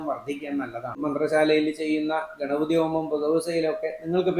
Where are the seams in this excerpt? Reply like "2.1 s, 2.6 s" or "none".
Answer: 1.0 s